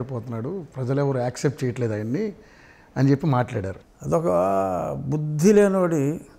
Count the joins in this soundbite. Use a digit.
1